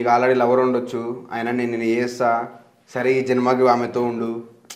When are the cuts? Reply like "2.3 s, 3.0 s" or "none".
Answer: none